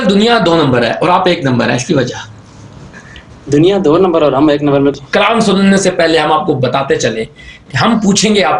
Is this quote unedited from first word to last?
no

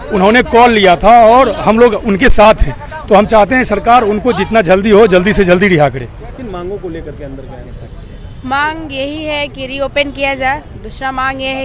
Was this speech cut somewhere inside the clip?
yes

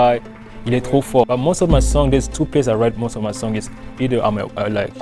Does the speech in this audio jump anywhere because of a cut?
yes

